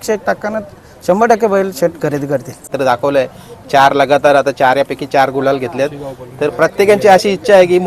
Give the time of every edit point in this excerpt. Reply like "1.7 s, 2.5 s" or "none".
2.6 s